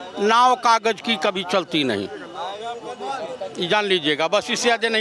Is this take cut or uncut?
uncut